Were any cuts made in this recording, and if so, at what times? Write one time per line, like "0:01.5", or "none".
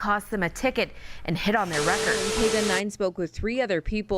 0:02.2

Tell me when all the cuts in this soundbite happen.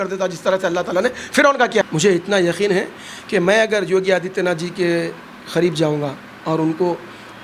0:01.8

